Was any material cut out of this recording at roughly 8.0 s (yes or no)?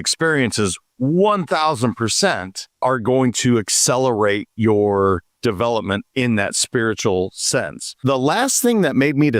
yes